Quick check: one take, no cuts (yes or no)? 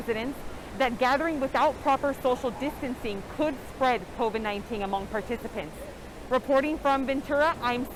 yes